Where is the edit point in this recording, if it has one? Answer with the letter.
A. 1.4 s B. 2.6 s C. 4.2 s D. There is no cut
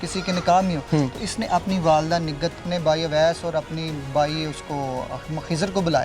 B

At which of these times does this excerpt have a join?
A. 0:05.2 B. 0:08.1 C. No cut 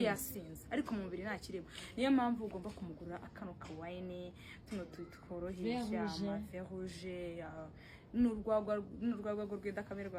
C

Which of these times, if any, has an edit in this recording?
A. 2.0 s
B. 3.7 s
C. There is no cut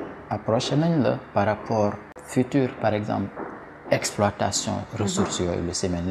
A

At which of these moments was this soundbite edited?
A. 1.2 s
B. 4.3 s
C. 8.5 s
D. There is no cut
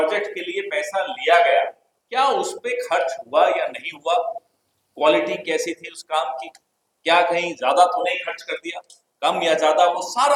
D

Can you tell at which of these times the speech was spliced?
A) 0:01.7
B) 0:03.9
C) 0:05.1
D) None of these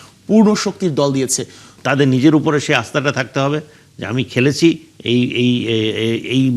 A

